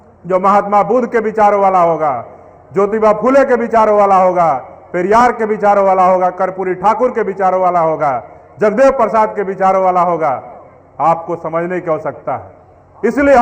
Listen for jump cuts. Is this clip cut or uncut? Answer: uncut